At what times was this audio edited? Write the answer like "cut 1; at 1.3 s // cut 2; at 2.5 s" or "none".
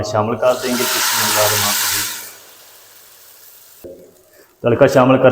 cut 1; at 3.9 s